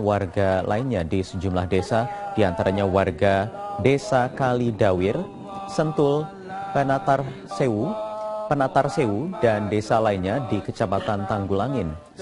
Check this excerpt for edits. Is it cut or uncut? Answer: cut